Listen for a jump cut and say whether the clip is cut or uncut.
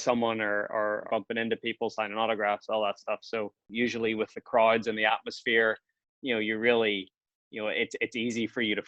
cut